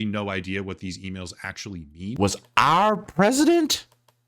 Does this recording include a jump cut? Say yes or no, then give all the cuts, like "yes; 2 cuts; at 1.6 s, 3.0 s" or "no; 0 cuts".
yes; 1 cut; at 2.2 s